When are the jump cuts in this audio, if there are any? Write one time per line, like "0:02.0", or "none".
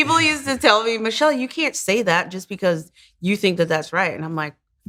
none